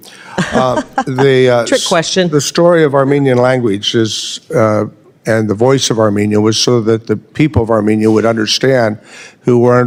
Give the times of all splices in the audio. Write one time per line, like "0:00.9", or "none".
none